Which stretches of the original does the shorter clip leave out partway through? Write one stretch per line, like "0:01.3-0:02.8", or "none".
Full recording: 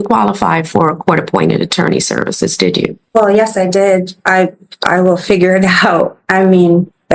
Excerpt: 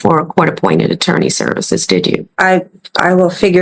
0:03.0-0:04.2